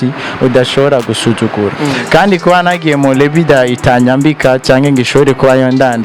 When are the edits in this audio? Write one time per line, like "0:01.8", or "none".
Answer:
0:01.8